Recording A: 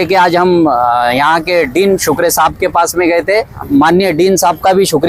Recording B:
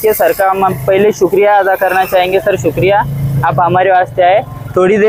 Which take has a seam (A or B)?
A